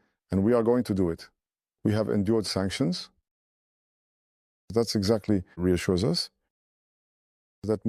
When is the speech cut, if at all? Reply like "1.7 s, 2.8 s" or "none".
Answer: 5.6 s